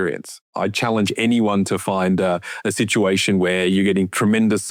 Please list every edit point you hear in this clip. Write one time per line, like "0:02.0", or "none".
none

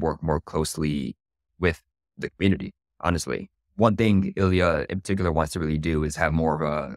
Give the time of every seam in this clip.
0:03.5

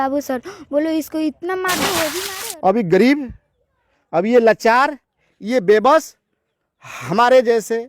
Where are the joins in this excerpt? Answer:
0:02.3

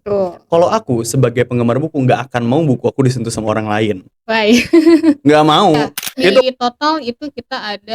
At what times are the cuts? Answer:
0:06.4

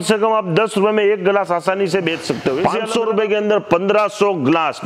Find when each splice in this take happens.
0:02.7

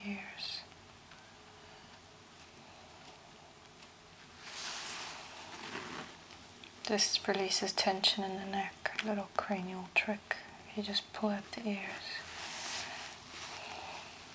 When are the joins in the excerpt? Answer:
none

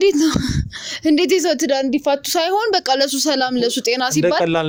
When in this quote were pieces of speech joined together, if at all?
none

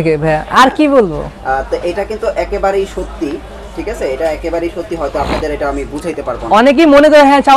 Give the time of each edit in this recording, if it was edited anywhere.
none

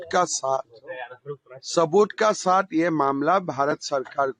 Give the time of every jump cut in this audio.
none

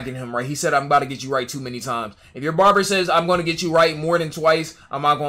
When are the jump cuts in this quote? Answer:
none

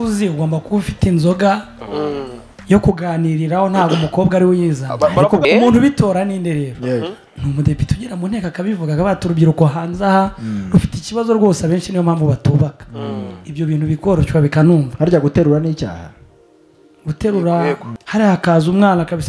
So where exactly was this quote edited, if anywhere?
0:05.4
0:17.9

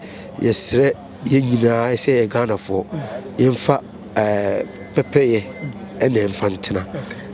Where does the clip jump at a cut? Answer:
none

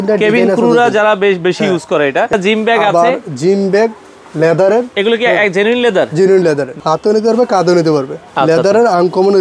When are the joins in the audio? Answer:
0:02.3
0:06.7

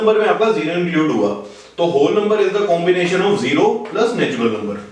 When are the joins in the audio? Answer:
none

